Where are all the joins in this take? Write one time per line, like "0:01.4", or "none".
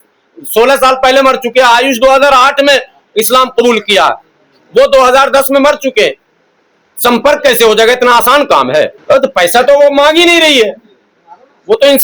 0:09.0